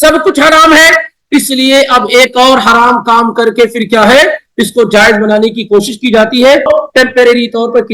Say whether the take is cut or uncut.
cut